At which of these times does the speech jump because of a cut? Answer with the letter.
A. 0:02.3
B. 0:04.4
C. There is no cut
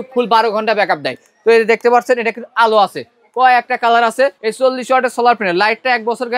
B